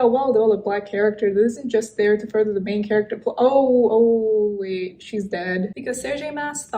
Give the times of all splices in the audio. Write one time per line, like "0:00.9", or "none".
0:05.7

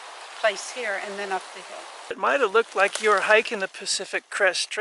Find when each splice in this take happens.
0:02.2

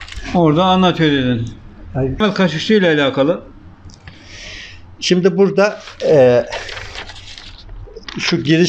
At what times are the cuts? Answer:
0:02.2

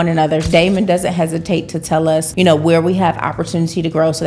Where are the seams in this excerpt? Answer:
none

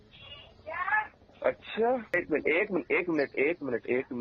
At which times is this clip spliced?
0:02.1

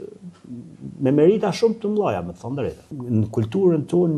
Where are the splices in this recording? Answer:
0:02.8

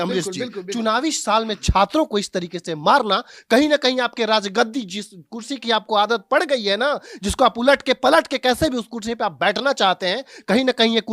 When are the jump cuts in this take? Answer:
none

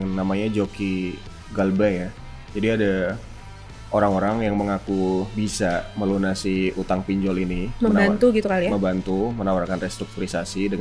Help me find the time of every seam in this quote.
none

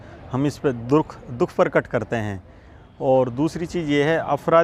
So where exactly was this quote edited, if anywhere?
none

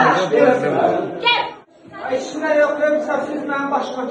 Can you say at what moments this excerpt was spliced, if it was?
none

